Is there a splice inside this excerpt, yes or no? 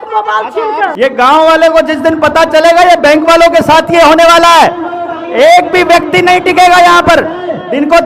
yes